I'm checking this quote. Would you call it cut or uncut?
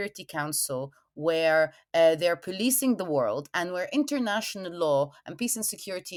uncut